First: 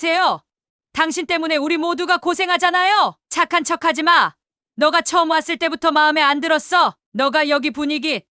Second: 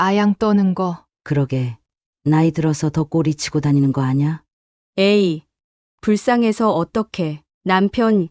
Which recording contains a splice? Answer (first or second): first